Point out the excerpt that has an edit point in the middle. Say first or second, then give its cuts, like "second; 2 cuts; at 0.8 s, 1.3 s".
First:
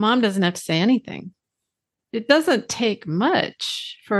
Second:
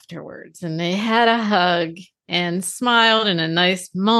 first; 1 cut; at 2.0 s